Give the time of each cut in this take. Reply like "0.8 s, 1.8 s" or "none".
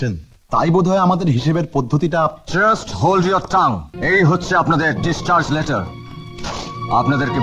3.9 s